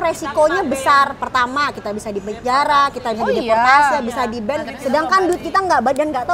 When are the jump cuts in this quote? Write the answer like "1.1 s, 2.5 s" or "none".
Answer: 4.6 s